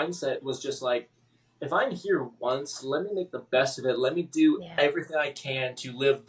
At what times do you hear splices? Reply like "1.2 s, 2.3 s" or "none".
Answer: none